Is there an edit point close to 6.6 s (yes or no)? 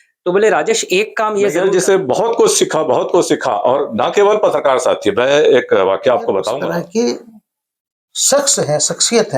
yes